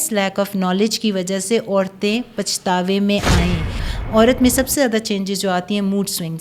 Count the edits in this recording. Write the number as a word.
one